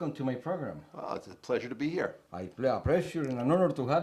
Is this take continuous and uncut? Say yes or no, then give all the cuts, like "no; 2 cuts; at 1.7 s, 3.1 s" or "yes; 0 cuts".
no; 1 cut; at 2.3 s